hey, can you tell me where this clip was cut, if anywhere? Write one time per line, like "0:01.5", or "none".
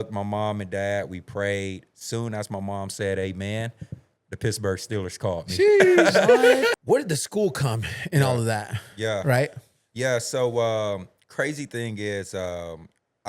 0:06.8